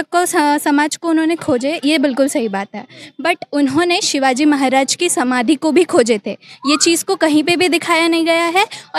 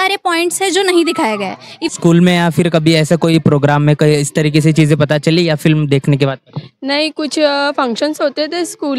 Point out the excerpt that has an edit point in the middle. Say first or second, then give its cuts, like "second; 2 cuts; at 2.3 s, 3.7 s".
second; 1 cut; at 1.8 s